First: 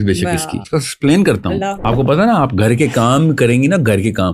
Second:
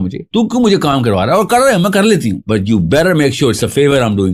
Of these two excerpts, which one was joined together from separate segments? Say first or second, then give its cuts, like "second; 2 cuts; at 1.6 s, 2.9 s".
first; 1 cut; at 1.8 s